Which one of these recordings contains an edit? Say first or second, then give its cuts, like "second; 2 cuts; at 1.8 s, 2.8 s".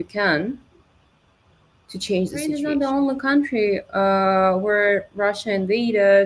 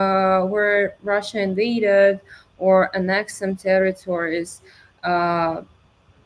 first; 1 cut; at 2.6 s